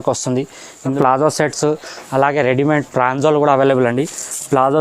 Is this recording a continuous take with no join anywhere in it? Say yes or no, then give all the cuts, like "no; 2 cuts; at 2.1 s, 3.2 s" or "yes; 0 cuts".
no; 1 cut; at 0.9 s